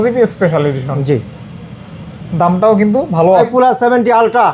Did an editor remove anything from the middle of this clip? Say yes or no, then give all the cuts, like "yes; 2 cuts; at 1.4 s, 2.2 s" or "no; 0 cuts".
yes; 1 cut; at 3.5 s